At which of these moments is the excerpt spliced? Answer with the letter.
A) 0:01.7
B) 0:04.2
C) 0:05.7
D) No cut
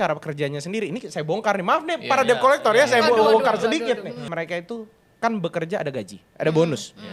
B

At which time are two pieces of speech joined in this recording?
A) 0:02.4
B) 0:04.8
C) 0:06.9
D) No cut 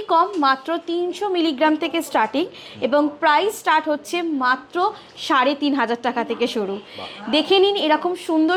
D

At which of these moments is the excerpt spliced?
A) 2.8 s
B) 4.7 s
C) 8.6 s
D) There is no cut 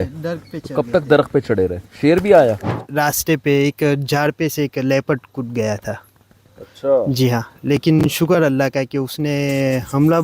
A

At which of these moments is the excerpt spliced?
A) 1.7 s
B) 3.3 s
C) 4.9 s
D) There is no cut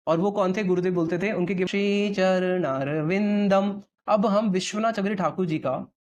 A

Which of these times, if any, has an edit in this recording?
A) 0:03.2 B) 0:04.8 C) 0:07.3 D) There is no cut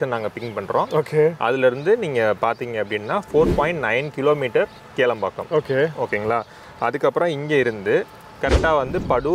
D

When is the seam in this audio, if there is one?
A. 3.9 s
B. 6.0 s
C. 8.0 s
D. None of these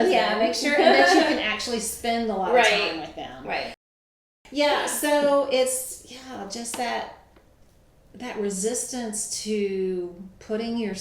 A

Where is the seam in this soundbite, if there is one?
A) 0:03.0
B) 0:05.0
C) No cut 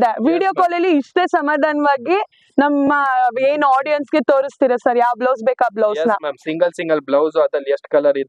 C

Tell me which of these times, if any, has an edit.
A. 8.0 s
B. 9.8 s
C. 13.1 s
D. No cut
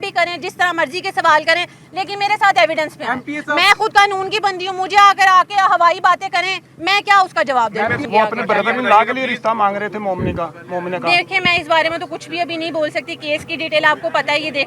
A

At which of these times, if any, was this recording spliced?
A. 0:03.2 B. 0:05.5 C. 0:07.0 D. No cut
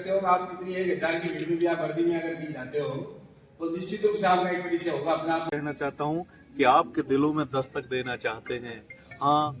B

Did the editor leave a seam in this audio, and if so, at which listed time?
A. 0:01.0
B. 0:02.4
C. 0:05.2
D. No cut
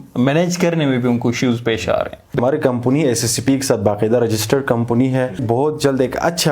B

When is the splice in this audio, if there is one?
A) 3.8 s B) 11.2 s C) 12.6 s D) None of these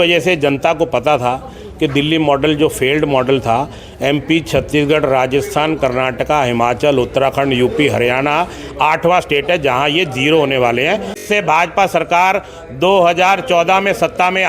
B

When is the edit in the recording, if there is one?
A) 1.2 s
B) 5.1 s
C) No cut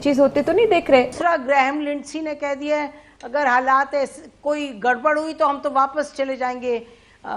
A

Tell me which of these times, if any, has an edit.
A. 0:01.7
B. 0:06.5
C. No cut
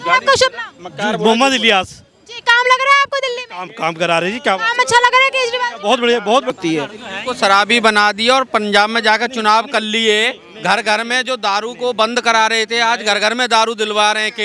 B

